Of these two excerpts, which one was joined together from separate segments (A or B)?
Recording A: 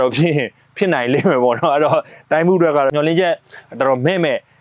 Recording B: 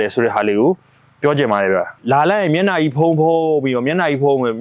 B